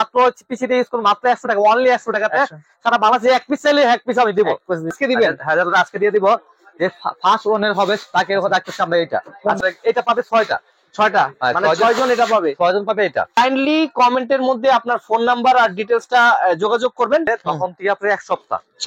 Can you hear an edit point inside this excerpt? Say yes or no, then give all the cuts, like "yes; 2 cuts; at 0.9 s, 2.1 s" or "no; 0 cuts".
yes; 4 cuts; at 4.9 s, 9.6 s, 13.3 s, 17.3 s